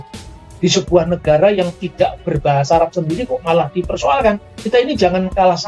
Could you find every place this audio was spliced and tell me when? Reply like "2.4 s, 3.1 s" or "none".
4.5 s